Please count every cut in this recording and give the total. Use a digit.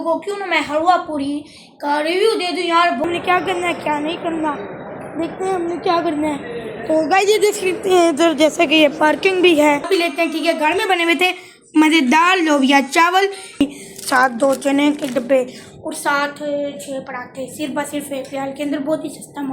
3